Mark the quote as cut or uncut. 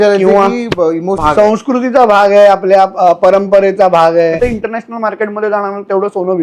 cut